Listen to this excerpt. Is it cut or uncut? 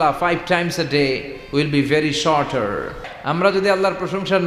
cut